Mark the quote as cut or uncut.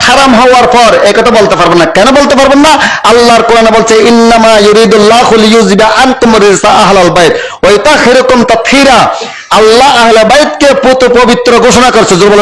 uncut